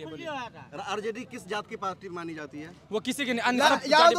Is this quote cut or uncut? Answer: cut